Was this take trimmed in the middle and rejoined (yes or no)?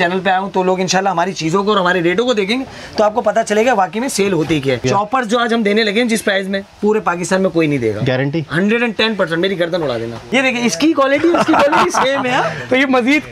yes